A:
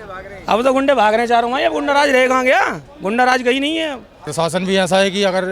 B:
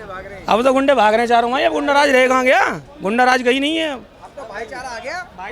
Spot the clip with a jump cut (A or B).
A